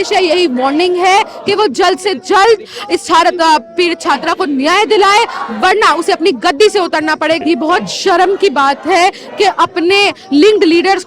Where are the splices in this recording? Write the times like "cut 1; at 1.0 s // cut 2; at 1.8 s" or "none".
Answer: cut 1; at 7.4 s